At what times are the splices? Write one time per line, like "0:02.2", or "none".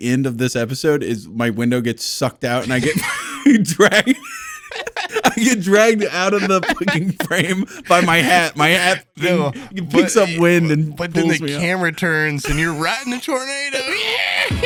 none